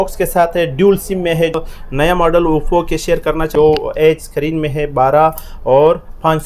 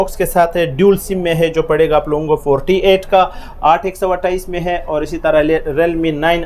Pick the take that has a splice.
first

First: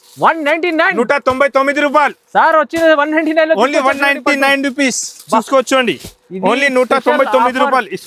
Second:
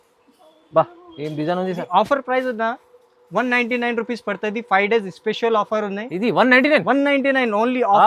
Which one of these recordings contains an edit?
second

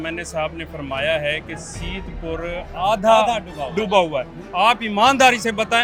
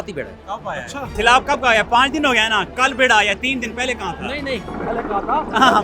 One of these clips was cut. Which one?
second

